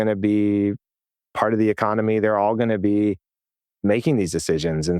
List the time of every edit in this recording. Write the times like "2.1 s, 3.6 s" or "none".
none

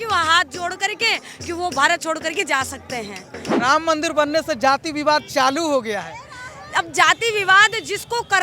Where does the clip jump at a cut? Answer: 3.5 s

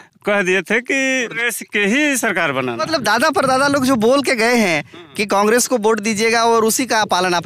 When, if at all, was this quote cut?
1.4 s, 2.8 s

